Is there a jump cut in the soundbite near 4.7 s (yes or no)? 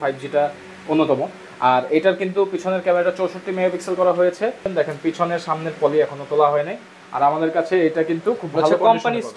yes